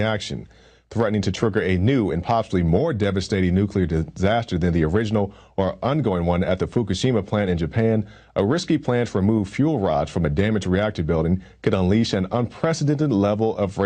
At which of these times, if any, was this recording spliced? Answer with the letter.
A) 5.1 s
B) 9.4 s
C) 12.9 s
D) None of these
D